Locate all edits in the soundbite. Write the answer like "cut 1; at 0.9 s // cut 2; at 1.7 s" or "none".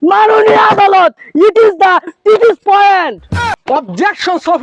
cut 1; at 3.5 s